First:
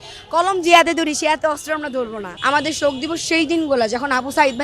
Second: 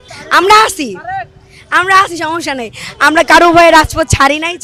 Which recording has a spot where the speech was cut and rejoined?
first; 1 cut; at 2.3 s

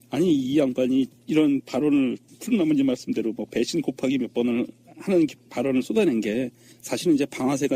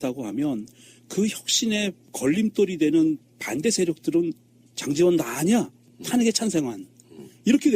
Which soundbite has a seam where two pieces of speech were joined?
second; 1 cut; at 4.8 s

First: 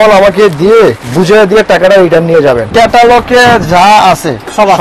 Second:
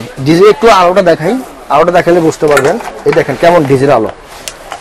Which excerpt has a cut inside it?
first; 2 cuts; at 1.0 s, 2.7 s

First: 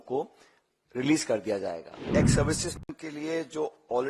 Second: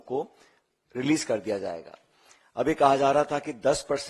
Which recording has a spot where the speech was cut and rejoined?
first; 1 cut; at 2.1 s

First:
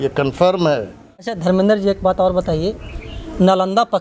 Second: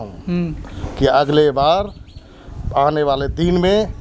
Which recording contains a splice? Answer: first; 1 cut; at 1.4 s

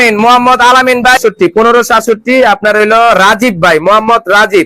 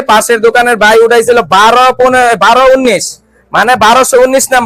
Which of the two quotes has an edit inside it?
first; 1 cut; at 1.2 s

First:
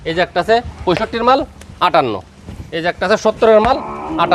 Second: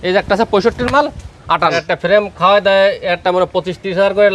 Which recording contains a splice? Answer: second; 1 cut; at 1.7 s

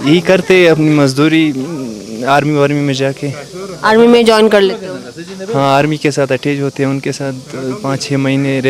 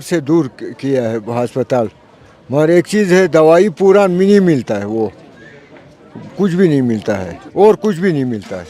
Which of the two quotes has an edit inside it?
second; 1 cut; at 7.4 s

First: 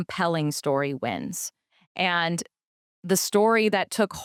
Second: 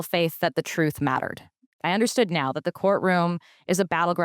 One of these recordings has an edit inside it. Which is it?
second; 1 cut; at 1.8 s

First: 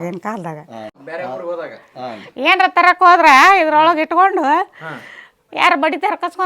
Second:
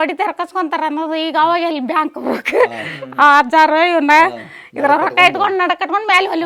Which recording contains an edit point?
first; 1 cut; at 1.0 s

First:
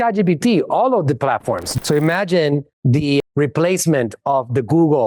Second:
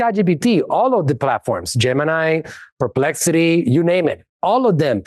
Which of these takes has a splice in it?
first; 1 cut; at 1.7 s

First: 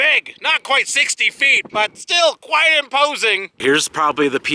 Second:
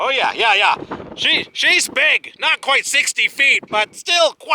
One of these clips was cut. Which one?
first; 1 cut; at 3.6 s

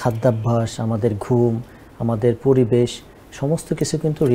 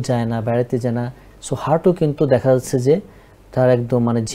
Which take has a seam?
second; 1 cut; at 1.2 s

